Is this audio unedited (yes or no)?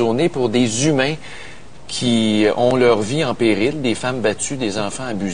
yes